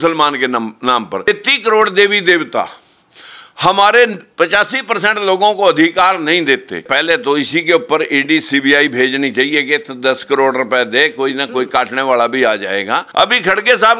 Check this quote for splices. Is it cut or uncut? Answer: cut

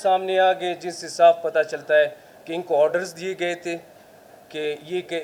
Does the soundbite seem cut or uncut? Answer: uncut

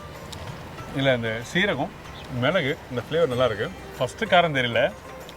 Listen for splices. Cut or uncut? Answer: cut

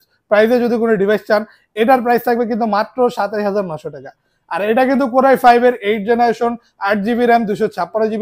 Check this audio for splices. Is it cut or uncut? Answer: uncut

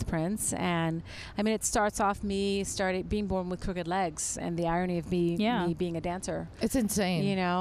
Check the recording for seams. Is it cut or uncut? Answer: uncut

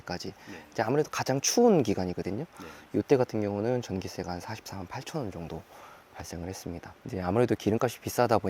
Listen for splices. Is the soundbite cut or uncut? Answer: cut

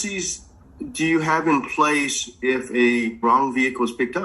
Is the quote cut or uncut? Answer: cut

